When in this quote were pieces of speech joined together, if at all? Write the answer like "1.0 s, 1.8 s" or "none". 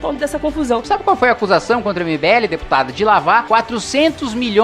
0.9 s, 3.4 s

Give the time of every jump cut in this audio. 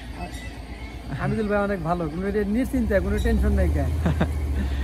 none

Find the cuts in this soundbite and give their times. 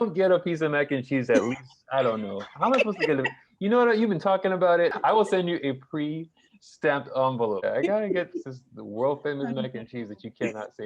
5.0 s, 7.6 s

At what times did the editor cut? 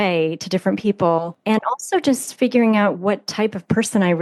1.3 s

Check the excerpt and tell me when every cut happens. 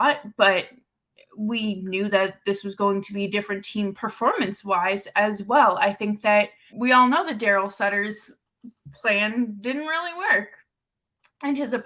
6.6 s

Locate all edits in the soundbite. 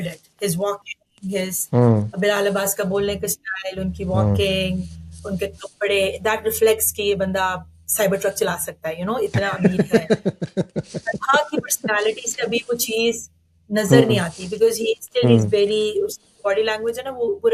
none

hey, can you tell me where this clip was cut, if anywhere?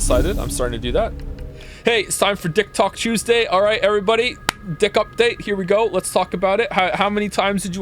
1.2 s

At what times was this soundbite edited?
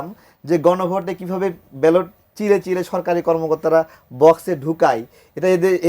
none

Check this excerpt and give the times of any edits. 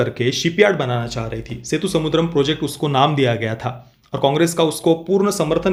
none

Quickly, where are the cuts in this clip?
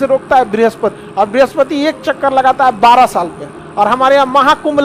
1.0 s

